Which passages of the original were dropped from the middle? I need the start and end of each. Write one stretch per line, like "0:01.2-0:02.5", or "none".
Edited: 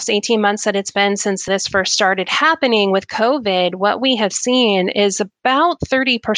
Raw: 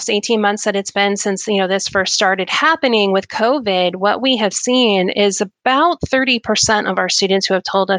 0:01.5-0:01.7